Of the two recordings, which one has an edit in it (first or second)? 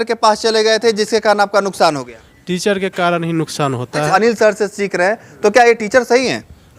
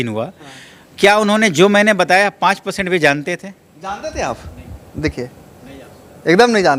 first